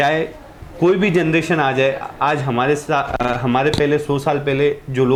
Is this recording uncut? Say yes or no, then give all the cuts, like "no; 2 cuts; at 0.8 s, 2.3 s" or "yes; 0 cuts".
yes; 0 cuts